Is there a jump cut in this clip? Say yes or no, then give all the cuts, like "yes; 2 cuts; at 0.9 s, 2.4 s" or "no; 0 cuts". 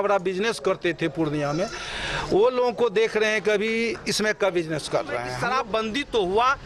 yes; 1 cut; at 5.3 s